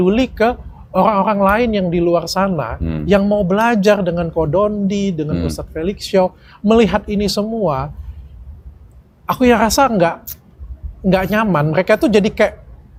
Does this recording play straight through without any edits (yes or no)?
yes